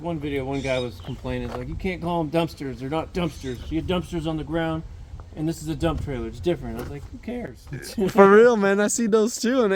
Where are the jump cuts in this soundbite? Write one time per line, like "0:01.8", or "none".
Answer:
none